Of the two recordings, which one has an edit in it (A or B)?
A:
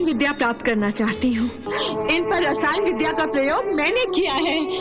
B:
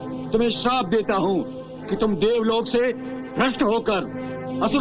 A